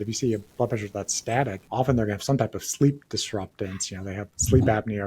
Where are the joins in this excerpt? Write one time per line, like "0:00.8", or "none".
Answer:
0:01.6